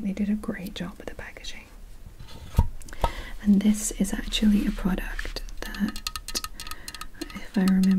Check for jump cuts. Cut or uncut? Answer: uncut